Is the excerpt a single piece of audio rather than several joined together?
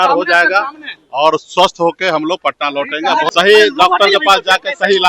no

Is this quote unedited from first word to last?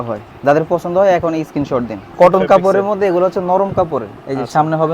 no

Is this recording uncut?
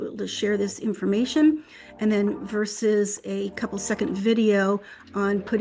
yes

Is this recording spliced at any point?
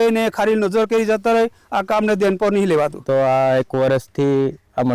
yes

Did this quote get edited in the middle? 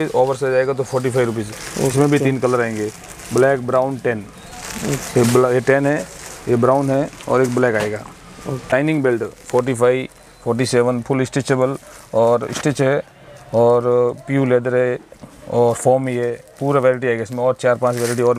no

